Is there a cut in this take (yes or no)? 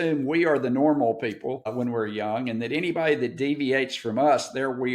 yes